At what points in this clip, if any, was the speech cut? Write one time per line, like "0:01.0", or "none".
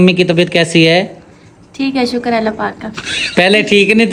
none